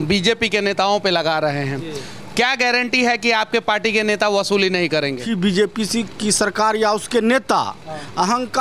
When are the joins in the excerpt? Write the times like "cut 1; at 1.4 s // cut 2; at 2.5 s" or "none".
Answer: cut 1; at 5.2 s